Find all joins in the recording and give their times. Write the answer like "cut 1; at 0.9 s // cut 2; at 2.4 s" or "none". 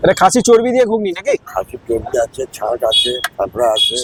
none